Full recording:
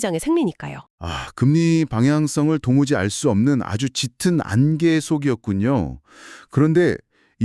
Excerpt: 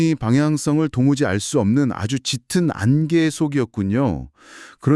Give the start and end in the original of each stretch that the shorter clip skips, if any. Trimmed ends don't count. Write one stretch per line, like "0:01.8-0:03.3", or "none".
none